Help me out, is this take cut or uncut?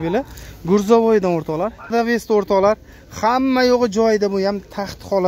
cut